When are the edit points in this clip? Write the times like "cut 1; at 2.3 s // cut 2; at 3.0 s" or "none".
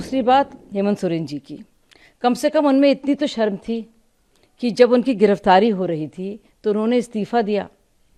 none